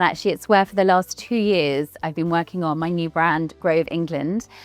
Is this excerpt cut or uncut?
uncut